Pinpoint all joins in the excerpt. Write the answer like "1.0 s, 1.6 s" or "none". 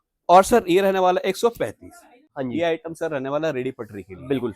2.3 s